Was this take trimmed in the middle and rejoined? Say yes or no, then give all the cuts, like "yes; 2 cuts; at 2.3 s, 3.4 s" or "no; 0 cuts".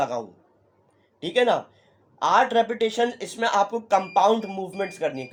no; 0 cuts